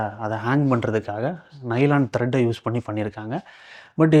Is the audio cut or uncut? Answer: uncut